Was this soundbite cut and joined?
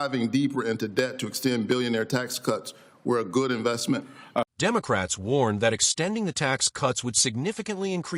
no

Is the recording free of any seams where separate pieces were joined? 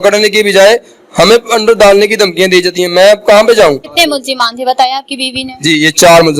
no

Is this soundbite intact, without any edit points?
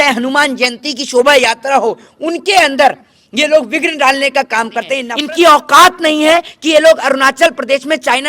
no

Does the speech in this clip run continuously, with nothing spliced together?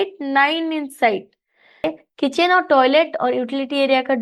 no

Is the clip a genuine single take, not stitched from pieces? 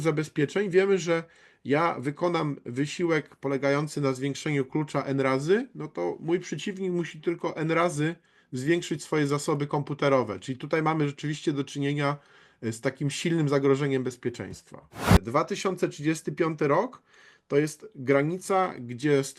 no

